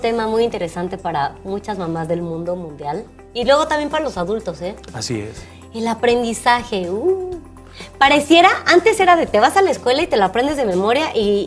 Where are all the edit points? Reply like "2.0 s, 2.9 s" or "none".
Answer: 5.9 s